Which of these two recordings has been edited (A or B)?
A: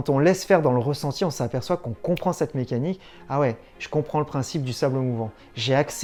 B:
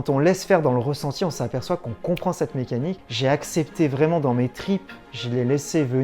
B